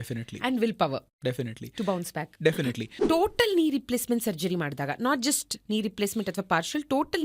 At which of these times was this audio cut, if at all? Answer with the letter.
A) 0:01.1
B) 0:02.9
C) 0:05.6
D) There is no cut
B